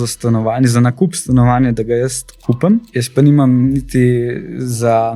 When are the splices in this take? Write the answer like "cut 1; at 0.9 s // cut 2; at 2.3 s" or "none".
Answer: cut 1; at 3.0 s